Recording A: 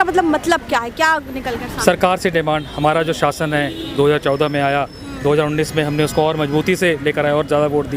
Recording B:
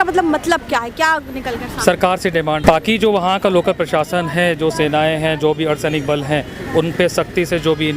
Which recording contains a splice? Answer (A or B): B